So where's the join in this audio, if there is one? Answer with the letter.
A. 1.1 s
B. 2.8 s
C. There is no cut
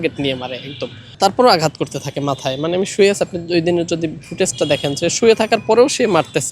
A